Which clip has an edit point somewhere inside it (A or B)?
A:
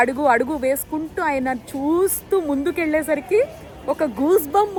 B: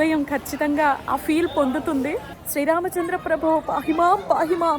B